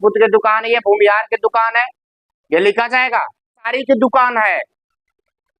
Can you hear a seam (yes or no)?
yes